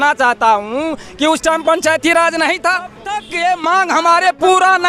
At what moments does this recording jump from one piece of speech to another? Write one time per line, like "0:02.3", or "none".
0:03.3